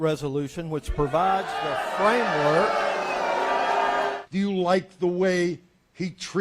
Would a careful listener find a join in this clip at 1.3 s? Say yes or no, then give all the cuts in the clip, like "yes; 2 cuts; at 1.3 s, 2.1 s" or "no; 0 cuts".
no; 1 cut; at 4.1 s